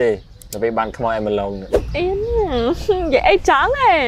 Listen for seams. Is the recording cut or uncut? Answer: cut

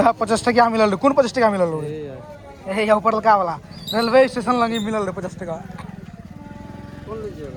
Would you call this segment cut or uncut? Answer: uncut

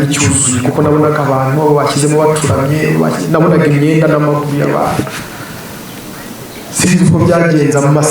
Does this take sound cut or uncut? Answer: uncut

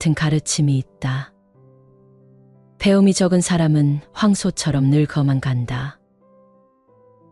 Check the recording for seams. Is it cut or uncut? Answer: uncut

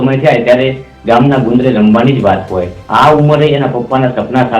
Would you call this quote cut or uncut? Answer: cut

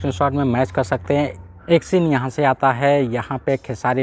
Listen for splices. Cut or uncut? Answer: cut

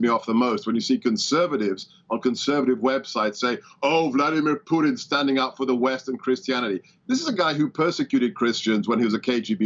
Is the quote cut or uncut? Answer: uncut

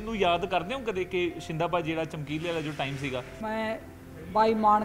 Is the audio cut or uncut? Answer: cut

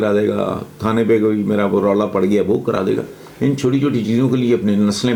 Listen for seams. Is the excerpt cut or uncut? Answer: uncut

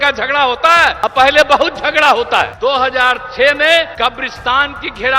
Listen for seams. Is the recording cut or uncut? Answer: cut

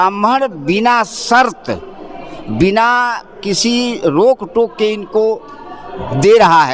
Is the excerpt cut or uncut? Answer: uncut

